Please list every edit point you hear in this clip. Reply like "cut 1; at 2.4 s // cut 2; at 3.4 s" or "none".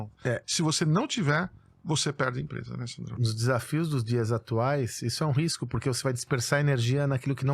cut 1; at 3.1 s